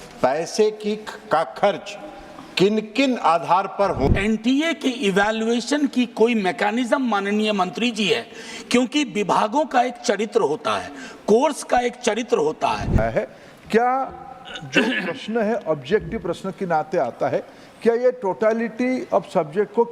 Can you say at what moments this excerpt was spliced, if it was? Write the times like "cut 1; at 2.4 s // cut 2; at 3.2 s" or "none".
cut 1; at 4.1 s // cut 2; at 13.0 s